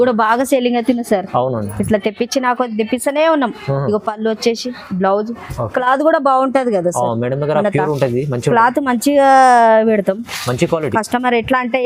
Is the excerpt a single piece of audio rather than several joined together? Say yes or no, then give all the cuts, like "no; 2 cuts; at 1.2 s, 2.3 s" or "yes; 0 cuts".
yes; 0 cuts